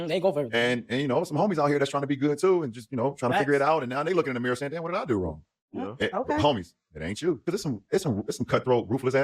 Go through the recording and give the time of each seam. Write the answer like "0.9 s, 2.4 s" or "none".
7.4 s